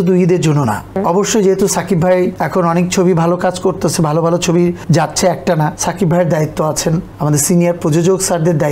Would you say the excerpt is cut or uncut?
cut